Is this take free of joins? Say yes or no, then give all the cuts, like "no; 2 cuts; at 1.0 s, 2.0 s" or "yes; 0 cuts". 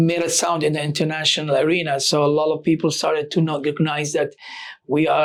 yes; 0 cuts